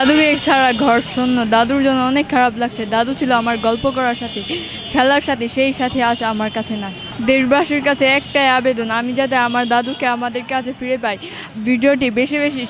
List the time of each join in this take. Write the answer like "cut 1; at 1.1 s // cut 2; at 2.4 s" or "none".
none